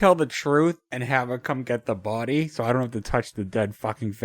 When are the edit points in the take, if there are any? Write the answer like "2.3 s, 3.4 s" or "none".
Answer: 0.9 s